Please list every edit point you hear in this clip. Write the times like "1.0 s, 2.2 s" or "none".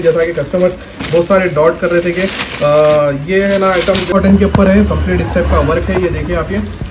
4.1 s